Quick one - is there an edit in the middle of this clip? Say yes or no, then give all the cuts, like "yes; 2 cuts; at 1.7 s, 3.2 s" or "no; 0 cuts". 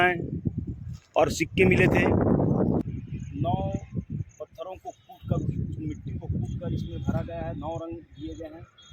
yes; 1 cut; at 2.8 s